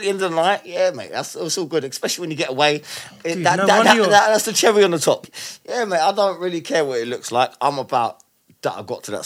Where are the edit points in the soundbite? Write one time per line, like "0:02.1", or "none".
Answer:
0:05.2